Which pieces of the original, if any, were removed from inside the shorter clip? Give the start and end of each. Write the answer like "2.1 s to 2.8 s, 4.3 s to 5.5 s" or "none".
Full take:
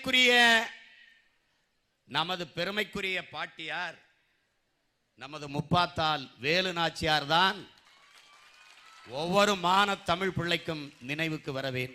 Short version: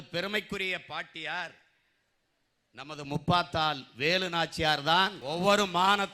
7.6 s to 9.1 s